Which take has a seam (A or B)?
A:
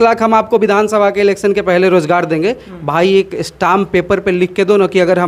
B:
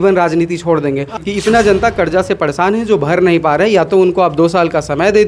B